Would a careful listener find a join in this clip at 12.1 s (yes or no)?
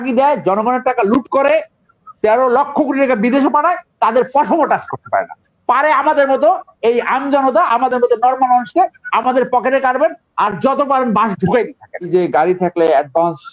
yes